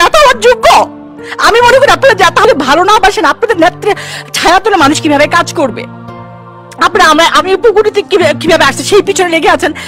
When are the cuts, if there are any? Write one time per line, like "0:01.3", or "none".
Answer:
0:02.4